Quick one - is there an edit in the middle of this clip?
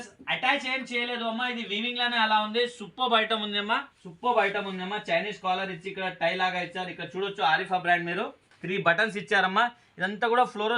yes; 1 cut; at 4.0 s

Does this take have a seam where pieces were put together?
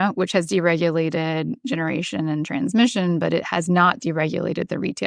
no; 0 cuts

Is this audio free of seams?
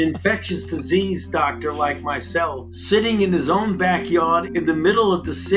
no; 2 cuts; at 2.7 s, 4.5 s

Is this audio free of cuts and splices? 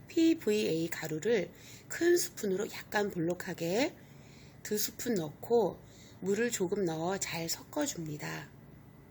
yes; 0 cuts

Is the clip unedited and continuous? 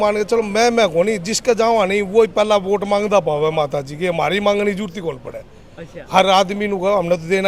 yes; 0 cuts

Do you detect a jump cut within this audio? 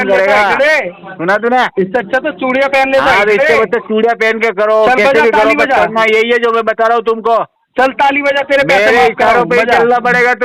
no; 0 cuts

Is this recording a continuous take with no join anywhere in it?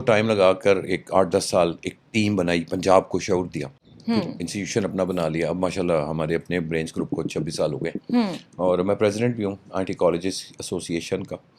yes; 0 cuts

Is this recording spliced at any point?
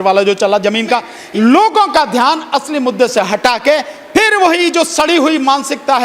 yes; 1 cut; at 1.1 s

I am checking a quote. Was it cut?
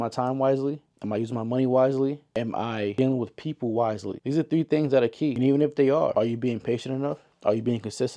yes; 2 cuts; at 4.1 s, 5.3 s

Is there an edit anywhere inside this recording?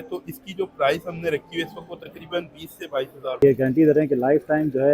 yes; 1 cut; at 3.4 s

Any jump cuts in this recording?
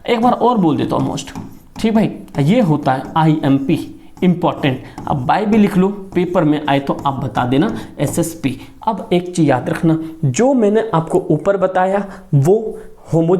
no; 0 cuts

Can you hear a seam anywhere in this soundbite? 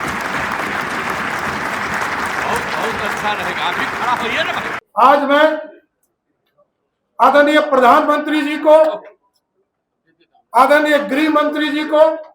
yes; 1 cut; at 4.8 s

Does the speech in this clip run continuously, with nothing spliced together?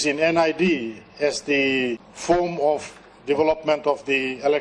no; 1 cut; at 2.1 s

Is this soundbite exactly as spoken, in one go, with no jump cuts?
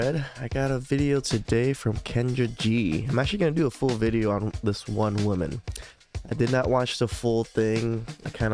yes; 0 cuts

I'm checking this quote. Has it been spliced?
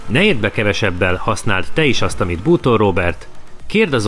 no; 0 cuts

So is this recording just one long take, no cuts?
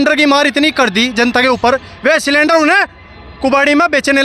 yes; 0 cuts

